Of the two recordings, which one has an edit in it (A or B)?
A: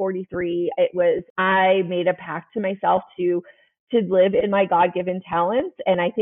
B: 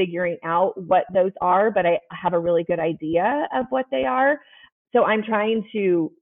A